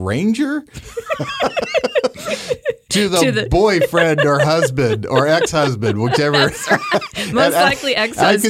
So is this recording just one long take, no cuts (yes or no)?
yes